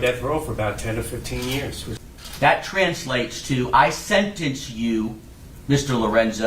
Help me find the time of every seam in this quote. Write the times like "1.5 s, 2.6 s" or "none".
1.8 s